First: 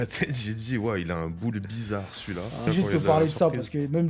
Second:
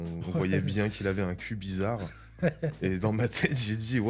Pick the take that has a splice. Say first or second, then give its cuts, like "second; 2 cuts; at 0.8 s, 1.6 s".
first; 1 cut; at 2.7 s